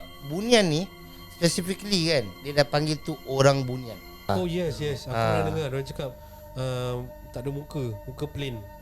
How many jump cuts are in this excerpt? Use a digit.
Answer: 1